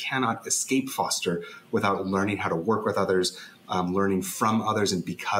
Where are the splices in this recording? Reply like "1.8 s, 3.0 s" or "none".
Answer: none